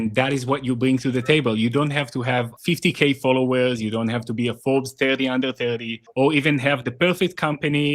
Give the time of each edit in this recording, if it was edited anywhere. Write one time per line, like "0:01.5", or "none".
0:06.0